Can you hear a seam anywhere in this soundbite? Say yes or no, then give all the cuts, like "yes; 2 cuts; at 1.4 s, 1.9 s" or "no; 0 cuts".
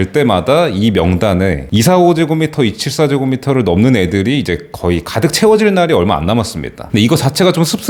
no; 0 cuts